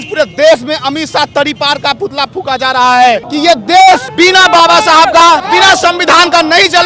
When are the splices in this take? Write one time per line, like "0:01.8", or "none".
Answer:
0:03.3
0:04.1
0:05.4